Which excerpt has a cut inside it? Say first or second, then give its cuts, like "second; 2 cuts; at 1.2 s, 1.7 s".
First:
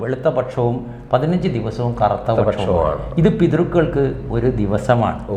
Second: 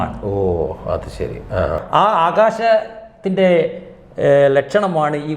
second; 1 cut; at 1.8 s